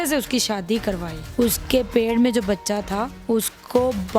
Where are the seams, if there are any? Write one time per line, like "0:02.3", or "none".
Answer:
0:01.1
0:03.1